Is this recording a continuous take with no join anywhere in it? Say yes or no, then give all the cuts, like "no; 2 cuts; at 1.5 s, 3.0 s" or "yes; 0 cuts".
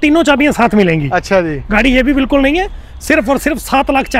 yes; 0 cuts